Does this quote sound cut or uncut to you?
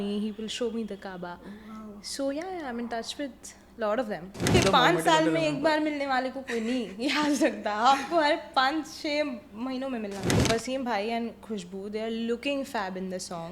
cut